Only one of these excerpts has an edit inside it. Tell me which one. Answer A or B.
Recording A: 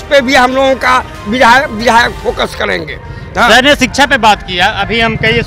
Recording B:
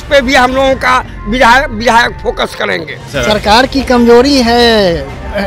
B